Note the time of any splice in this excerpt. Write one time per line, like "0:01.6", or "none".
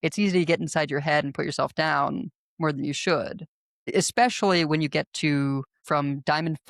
0:03.9
0:05.7